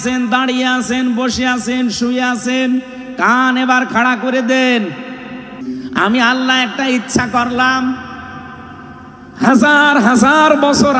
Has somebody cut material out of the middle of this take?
yes; 1 cut; at 5.6 s

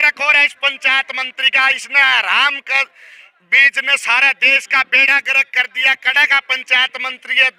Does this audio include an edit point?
no; 0 cuts

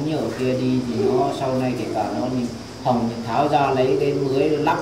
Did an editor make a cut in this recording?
no; 0 cuts

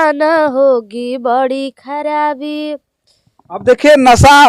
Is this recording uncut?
yes; 0 cuts

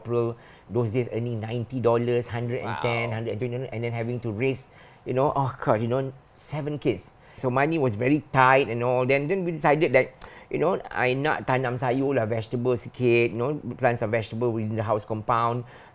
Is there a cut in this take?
no; 0 cuts

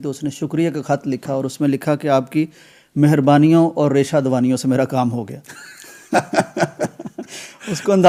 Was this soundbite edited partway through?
no; 0 cuts

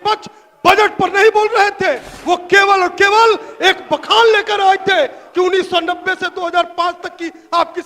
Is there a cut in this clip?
yes; 1 cut; at 2.1 s

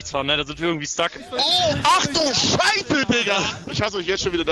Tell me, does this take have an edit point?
yes; 2 cuts; at 1.2 s, 3.6 s

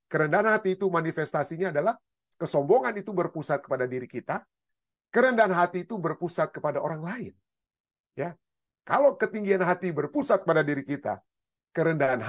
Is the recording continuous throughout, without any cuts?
yes; 0 cuts

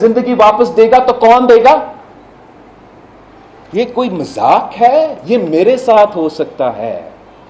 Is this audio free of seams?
yes; 0 cuts

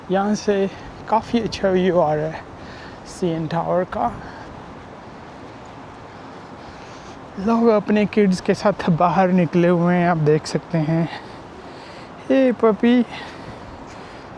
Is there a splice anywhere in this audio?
no; 0 cuts

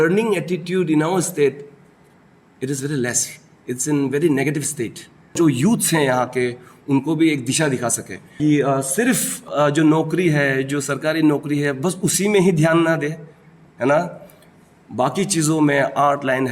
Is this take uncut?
no; 3 cuts; at 5.3 s, 8.3 s, 9.5 s

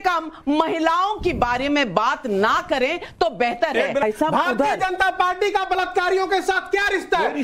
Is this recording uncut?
no; 1 cut; at 4.0 s

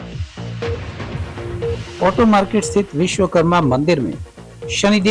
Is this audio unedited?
no; 1 cut; at 1.9 s

